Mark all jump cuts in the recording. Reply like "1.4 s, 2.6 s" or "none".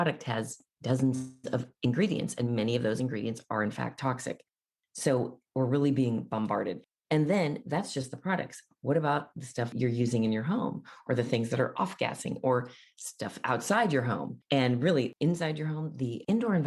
9.7 s, 14.3 s